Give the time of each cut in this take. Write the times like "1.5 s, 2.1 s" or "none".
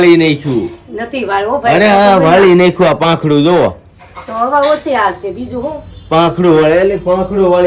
none